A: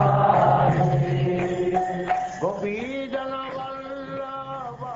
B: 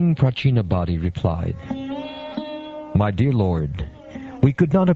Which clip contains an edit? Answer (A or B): B